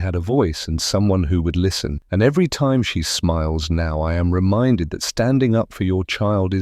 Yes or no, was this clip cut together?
yes